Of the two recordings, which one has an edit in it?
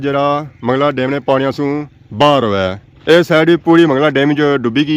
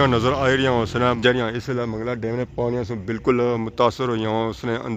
second; 1 cut; at 1.2 s

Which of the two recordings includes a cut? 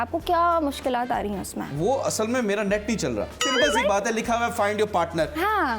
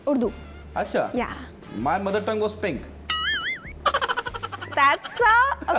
first; 1 cut; at 3.4 s

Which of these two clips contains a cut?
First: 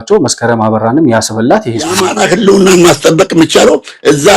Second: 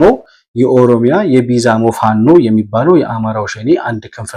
first; 1 cut; at 2.1 s

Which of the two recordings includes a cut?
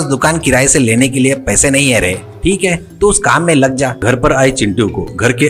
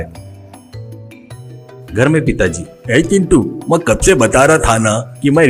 first; 1 cut; at 4.0 s

